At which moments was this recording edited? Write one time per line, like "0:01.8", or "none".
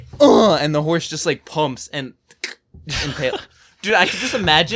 none